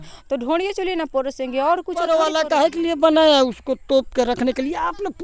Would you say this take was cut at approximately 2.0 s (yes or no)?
yes